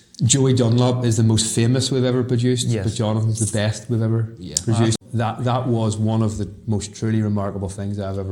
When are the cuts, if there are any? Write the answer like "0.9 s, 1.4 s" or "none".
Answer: 5.0 s